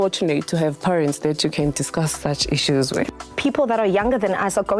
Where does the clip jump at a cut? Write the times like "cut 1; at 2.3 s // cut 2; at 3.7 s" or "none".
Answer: cut 1; at 3.1 s